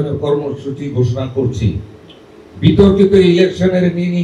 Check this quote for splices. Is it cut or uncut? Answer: uncut